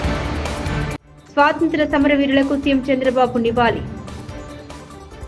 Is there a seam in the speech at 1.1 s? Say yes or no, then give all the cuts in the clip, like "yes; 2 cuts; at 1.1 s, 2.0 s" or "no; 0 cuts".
no; 0 cuts